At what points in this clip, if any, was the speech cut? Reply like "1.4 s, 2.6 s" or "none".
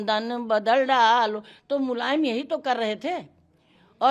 none